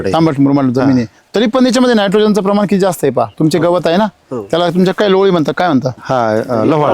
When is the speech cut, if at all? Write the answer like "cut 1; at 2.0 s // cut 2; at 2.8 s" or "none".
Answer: cut 1; at 3.3 s // cut 2; at 6.0 s